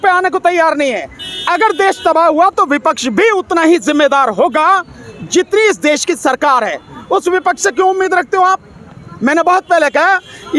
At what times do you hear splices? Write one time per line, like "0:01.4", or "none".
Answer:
none